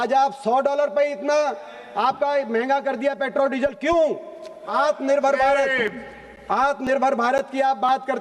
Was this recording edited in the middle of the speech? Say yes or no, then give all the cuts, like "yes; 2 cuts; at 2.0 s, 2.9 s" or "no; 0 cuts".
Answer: yes; 1 cut; at 4.6 s